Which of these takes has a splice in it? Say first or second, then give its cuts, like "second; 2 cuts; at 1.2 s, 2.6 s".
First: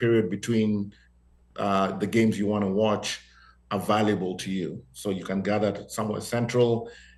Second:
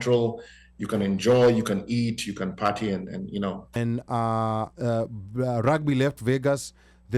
second; 1 cut; at 3.8 s